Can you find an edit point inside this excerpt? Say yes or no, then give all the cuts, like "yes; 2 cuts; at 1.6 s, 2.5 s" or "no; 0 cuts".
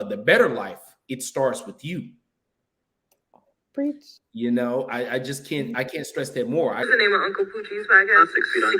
yes; 1 cut; at 6.8 s